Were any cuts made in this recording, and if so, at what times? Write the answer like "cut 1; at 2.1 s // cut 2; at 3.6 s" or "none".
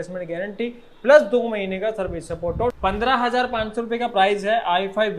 cut 1; at 2.7 s